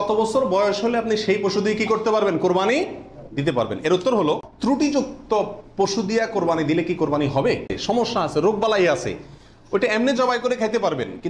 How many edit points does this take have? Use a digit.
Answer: 2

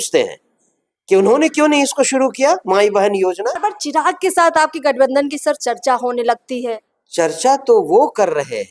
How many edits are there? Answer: 1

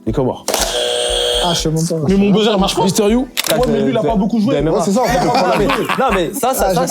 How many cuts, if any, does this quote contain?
1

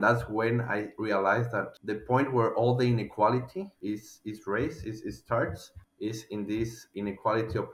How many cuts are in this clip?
0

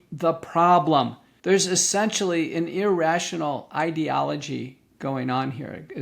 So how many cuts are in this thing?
1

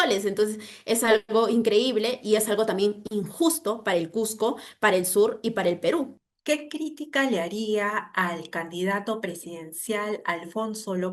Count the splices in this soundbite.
0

